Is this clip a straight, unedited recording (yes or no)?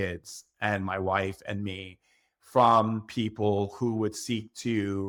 yes